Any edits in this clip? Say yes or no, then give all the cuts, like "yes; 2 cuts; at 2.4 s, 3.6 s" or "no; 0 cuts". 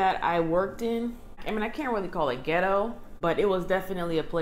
yes; 2 cuts; at 1.3 s, 3.0 s